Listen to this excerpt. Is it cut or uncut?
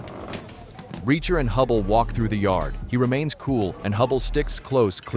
uncut